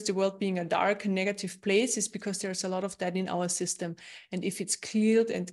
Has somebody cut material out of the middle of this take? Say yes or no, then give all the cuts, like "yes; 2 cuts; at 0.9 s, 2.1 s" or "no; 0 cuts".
no; 0 cuts